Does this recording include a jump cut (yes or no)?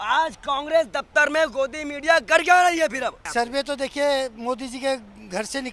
yes